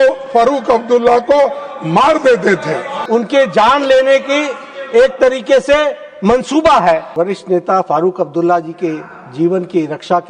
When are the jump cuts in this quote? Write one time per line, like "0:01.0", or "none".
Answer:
0:02.9
0:07.1